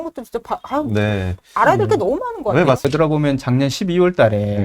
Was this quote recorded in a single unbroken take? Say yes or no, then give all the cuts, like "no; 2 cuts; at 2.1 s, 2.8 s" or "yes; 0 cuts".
no; 1 cut; at 2.8 s